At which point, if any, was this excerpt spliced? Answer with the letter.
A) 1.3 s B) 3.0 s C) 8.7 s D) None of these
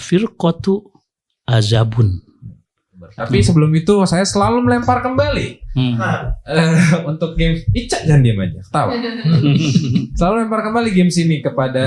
B